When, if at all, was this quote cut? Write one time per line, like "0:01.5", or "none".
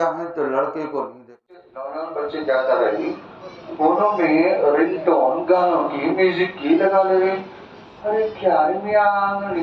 0:01.4